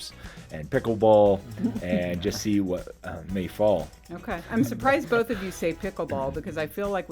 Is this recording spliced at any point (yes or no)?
yes